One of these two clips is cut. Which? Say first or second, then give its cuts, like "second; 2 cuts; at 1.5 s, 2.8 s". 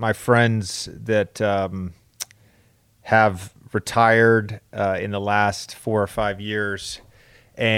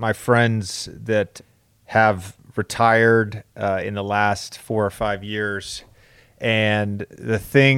second; 1 cut; at 1.3 s